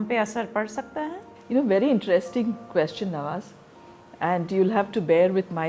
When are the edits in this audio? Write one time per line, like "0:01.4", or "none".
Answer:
0:01.2